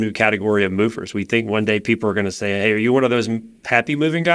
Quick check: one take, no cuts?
yes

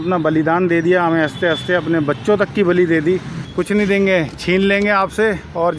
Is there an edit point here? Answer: yes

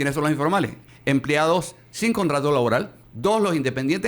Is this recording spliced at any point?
yes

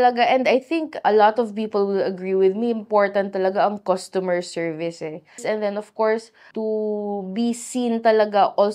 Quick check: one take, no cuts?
no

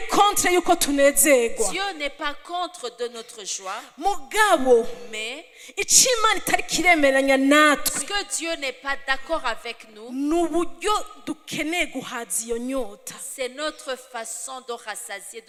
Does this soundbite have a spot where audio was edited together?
no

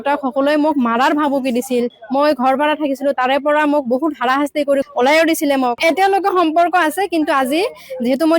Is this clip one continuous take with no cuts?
no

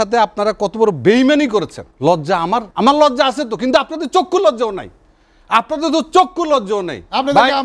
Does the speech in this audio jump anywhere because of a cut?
yes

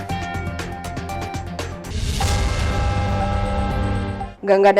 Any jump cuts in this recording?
yes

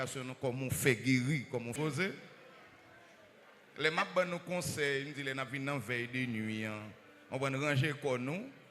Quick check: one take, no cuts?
no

